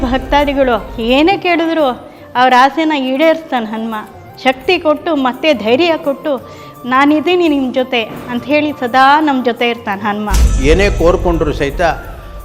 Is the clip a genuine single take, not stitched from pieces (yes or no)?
no